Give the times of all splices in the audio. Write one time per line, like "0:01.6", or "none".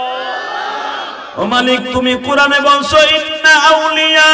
0:01.2